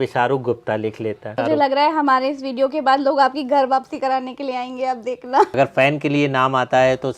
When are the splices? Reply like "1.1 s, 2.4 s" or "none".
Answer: 1.3 s, 5.5 s